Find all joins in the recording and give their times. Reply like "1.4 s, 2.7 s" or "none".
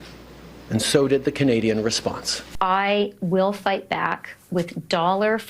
2.4 s